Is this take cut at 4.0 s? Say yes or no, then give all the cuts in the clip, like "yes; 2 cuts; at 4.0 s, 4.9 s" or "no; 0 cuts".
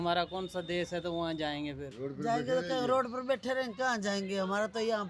no; 1 cut; at 1.9 s